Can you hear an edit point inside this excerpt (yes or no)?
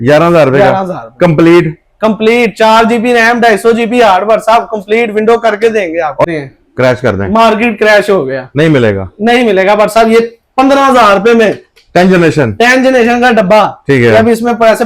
yes